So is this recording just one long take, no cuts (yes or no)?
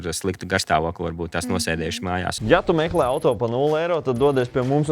no